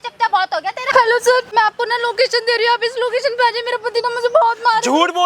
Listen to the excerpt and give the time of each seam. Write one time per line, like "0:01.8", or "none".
0:00.8
0:01.5

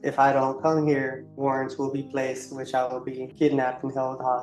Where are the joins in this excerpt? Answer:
0:01.2
0:03.2

